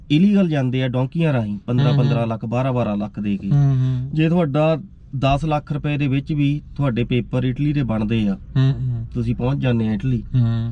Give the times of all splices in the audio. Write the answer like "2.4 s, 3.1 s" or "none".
none